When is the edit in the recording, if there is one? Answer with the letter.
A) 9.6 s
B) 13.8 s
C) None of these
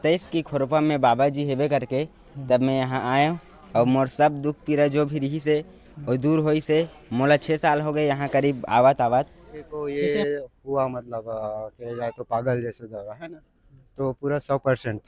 A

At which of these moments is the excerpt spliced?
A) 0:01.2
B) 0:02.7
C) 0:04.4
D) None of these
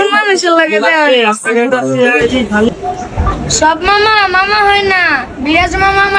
B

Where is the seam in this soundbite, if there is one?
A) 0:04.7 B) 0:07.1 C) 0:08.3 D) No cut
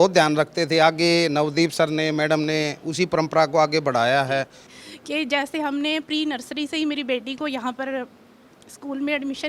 A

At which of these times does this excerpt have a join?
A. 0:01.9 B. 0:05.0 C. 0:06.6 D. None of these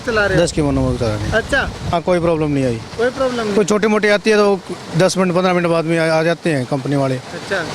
A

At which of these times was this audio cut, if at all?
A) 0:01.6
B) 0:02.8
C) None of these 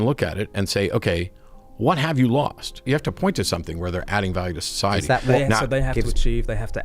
B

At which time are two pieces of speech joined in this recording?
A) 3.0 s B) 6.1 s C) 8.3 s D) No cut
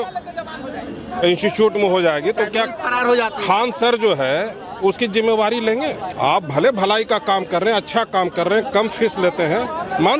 B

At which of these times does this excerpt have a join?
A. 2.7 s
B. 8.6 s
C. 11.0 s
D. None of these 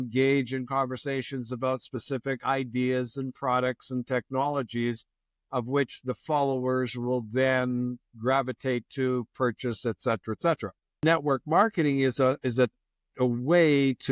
C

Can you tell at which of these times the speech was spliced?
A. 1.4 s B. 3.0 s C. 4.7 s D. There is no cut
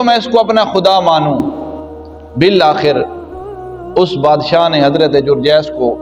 D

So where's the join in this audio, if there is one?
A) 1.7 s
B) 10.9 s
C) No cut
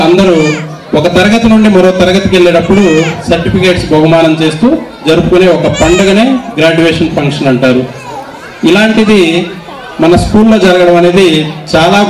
C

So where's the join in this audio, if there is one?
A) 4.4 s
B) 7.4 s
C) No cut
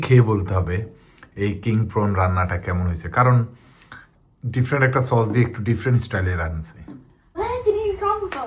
B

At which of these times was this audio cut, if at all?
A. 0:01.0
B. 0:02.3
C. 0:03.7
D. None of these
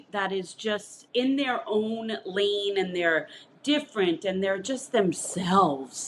A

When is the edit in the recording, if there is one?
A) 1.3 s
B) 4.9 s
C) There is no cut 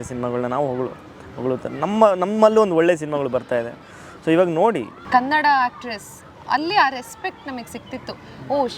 B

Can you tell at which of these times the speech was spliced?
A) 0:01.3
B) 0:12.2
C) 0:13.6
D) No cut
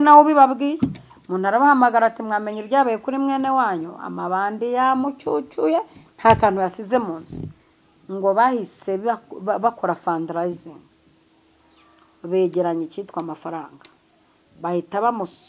D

